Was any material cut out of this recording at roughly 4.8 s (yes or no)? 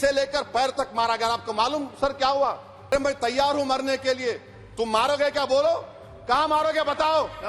no